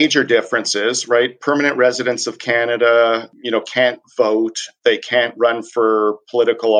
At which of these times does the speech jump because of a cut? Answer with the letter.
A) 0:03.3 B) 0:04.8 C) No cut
C